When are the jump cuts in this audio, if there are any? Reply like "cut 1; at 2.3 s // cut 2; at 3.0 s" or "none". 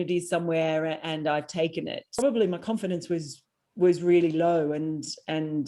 cut 1; at 2.2 s